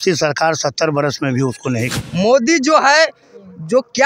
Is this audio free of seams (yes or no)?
no